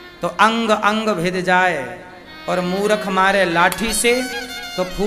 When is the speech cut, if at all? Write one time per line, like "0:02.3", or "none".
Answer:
none